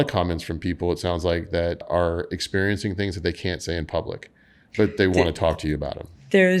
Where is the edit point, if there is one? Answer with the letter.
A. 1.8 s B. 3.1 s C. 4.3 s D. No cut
A